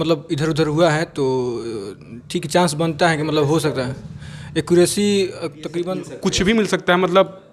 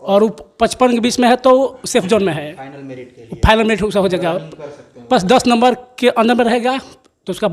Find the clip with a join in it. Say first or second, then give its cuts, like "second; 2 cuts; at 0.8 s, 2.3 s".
first; 1 cut; at 6.0 s